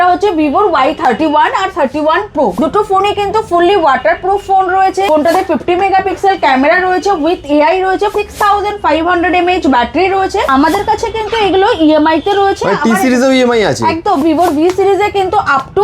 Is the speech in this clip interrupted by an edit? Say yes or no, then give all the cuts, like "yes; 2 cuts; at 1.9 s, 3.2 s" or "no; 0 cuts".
yes; 5 cuts; at 2.5 s, 5.1 s, 8.1 s, 10.5 s, 14.2 s